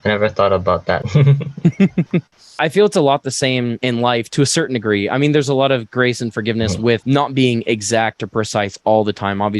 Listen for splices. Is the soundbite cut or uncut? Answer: cut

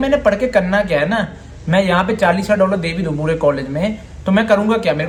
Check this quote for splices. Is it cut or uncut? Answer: uncut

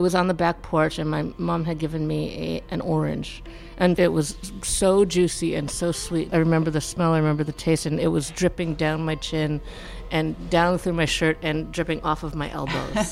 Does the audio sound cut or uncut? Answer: cut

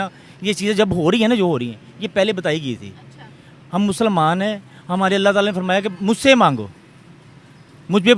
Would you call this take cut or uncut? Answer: uncut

